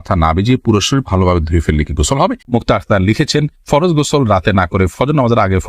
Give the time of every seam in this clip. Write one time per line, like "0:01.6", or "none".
0:02.4